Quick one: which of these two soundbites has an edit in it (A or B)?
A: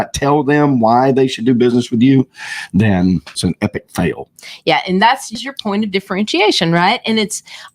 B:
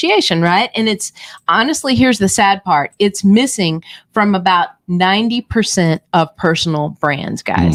A